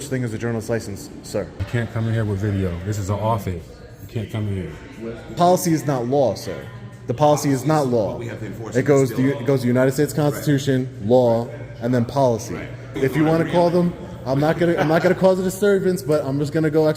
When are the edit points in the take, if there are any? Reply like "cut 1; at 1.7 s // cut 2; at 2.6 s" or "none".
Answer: cut 1; at 1.7 s // cut 2; at 5.3 s // cut 3; at 13.0 s